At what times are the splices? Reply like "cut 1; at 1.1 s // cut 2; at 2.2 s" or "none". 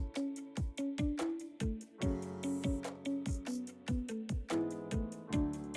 cut 1; at 1.7 s // cut 2; at 4.2 s